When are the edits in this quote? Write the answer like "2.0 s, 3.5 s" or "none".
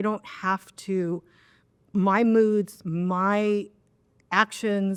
none